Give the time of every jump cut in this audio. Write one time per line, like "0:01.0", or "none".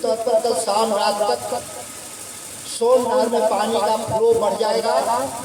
none